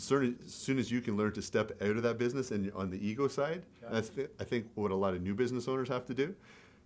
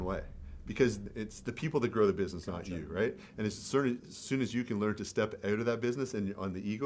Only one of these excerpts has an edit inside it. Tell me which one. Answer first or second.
second